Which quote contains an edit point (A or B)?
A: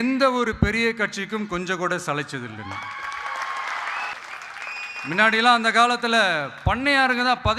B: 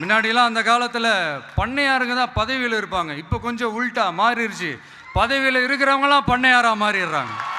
A